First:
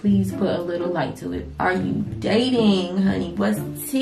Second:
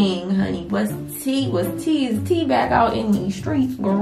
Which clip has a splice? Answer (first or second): first